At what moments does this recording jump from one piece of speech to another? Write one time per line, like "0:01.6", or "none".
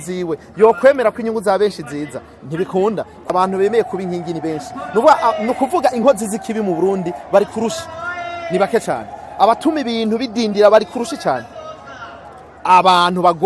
0:03.3